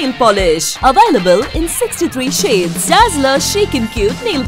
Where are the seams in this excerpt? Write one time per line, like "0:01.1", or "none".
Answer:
none